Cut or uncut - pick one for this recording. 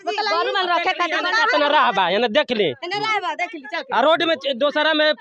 uncut